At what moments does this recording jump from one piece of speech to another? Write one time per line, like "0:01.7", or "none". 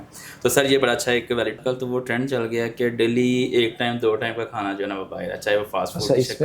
0:01.6